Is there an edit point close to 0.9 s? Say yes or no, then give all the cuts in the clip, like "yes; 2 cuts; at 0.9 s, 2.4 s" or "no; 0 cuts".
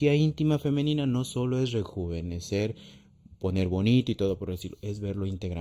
no; 0 cuts